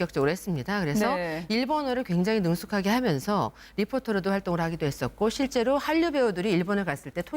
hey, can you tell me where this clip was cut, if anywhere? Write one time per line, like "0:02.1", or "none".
0:03.2